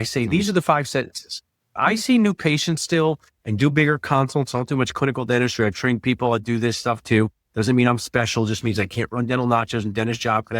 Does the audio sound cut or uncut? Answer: cut